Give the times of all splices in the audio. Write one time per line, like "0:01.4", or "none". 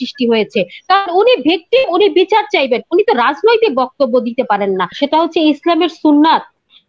0:04.6